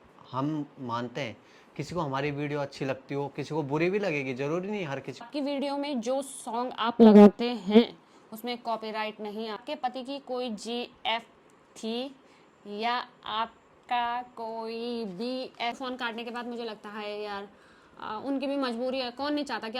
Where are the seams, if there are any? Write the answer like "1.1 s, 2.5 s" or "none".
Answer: 5.3 s, 9.6 s, 15.8 s

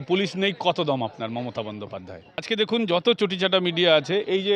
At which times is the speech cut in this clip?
2.4 s

